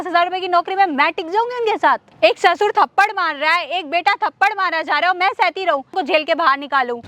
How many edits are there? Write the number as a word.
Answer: two